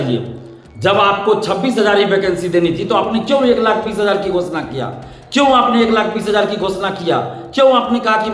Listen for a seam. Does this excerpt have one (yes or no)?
no